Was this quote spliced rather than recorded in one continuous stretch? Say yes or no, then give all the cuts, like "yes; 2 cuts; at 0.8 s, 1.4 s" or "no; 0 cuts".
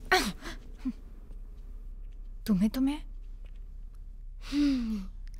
no; 0 cuts